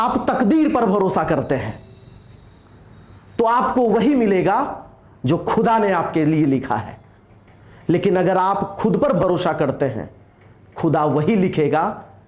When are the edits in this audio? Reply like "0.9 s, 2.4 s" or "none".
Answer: none